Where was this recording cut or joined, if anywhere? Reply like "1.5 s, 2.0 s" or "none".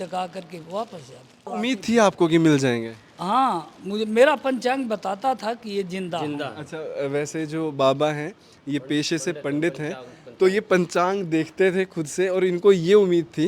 1.5 s